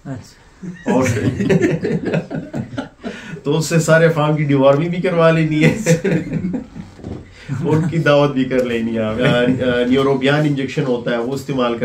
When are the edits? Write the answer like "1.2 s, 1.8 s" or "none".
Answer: 9.2 s